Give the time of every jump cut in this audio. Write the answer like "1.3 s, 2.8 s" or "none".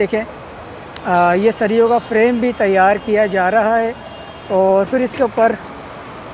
none